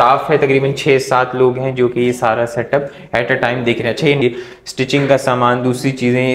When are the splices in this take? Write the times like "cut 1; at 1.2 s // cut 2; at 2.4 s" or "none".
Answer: cut 1; at 4.2 s

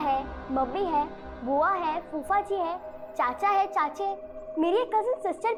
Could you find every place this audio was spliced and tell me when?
none

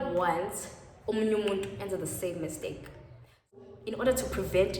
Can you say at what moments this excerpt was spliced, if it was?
cut 1; at 3.6 s

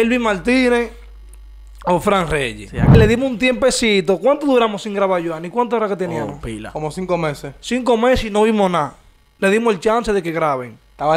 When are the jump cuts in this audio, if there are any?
cut 1; at 2.9 s

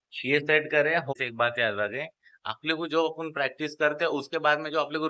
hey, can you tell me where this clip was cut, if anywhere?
cut 1; at 1.1 s

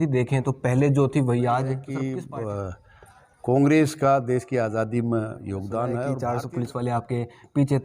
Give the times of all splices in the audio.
cut 1; at 1.9 s // cut 2; at 6.2 s

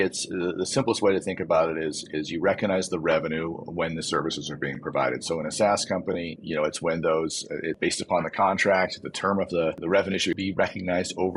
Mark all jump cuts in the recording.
cut 1; at 6.4 s // cut 2; at 7.8 s // cut 3; at 10.0 s

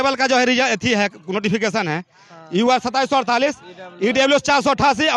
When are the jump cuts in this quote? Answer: none

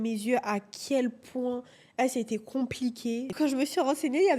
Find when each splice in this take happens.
cut 1; at 3.3 s

